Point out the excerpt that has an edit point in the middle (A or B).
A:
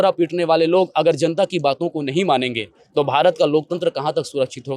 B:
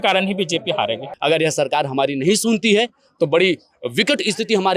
B